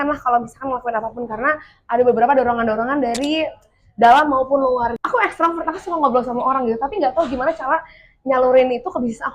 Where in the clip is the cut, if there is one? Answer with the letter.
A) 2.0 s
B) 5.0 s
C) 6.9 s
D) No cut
B